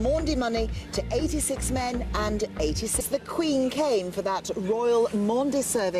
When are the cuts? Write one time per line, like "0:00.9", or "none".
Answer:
none

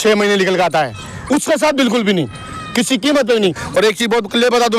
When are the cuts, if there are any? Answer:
0:03.6

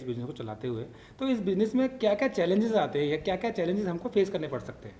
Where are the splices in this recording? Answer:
none

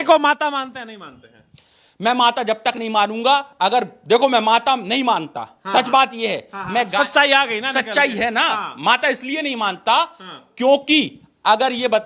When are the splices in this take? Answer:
none

